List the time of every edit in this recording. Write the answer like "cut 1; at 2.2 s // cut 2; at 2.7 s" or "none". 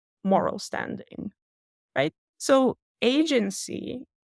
none

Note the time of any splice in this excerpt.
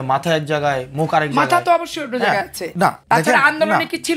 cut 1; at 3.0 s

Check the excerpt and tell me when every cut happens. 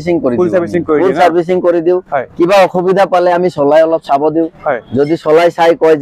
none

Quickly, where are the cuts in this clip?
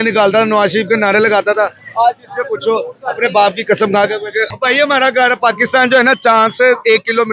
cut 1; at 4.5 s

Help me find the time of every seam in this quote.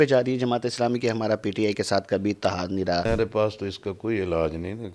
cut 1; at 3.1 s

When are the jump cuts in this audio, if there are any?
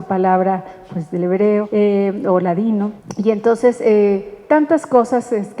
cut 1; at 1.7 s // cut 2; at 3.0 s

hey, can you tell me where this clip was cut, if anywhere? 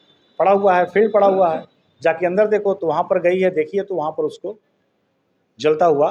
none

